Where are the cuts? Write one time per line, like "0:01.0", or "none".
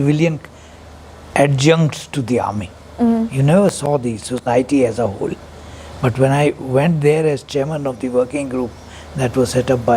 none